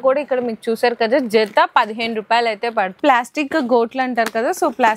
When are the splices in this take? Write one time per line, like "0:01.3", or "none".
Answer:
0:03.0